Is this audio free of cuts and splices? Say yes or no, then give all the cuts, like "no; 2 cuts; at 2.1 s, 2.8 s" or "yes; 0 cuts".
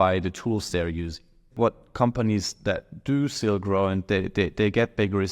no; 1 cut; at 1.6 s